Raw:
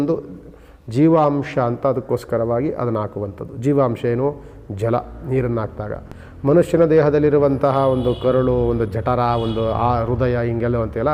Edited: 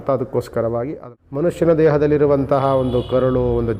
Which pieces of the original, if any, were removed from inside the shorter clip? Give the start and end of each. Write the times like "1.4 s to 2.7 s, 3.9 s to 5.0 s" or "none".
2.7 s to 6.1 s